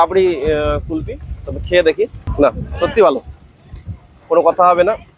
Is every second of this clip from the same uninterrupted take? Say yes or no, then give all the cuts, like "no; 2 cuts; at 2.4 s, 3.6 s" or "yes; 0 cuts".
no; 1 cut; at 2.2 s